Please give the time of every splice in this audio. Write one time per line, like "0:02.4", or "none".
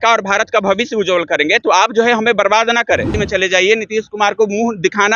0:03.1